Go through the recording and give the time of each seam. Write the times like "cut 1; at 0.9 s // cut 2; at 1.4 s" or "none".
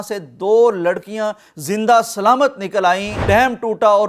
cut 1; at 3.2 s